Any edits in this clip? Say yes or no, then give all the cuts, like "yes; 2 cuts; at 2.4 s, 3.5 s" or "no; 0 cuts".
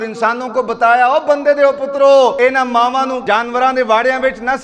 yes; 2 cuts; at 2.4 s, 3.2 s